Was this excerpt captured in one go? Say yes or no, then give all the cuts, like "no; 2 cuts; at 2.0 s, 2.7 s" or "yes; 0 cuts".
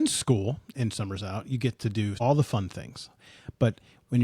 no; 1 cut; at 2.2 s